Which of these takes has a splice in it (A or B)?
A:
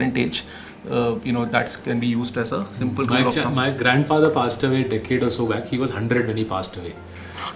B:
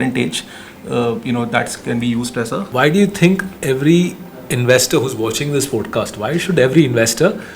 B